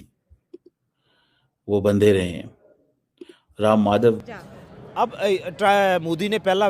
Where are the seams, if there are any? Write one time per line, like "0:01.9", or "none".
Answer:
0:04.2